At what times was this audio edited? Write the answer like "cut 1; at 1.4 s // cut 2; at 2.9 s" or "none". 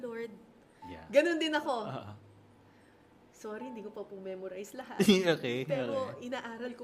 none